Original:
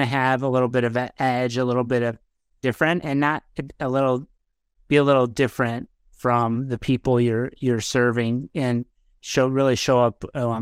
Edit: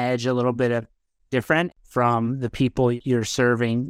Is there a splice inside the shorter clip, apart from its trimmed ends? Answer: yes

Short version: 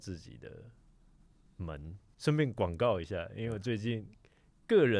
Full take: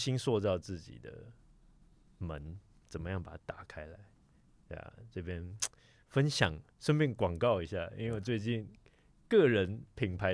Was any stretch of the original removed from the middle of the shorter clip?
yes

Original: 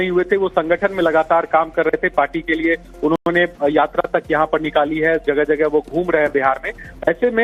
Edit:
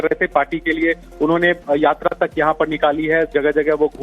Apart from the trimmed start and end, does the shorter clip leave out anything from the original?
yes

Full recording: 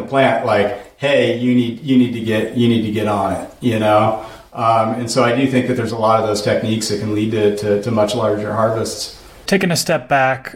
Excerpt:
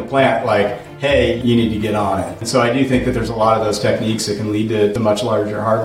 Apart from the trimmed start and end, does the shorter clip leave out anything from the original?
yes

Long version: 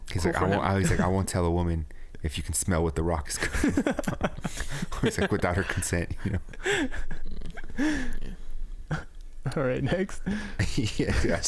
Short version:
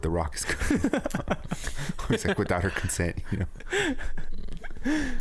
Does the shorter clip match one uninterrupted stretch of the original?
yes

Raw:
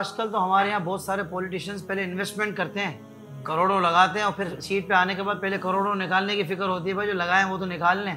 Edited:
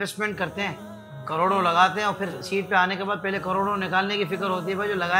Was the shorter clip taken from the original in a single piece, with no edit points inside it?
yes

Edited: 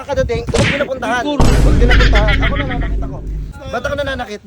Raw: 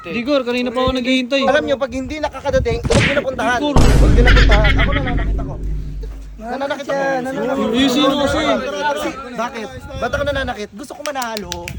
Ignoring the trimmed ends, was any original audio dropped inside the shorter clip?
yes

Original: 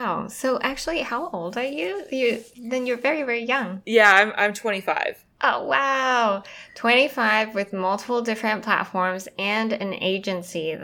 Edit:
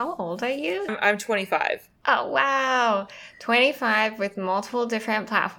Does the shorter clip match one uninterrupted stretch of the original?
no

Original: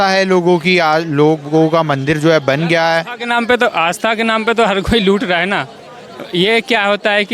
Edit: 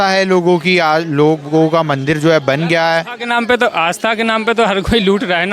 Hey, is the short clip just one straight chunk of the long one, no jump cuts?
yes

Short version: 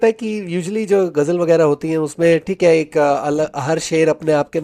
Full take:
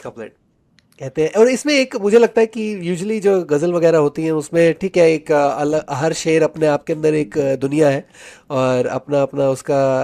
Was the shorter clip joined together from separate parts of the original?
no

